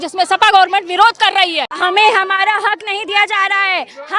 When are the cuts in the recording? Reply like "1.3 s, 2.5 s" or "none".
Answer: 1.6 s

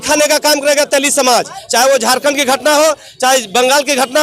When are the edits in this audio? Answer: 1.6 s

